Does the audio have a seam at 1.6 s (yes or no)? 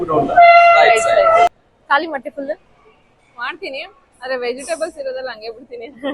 yes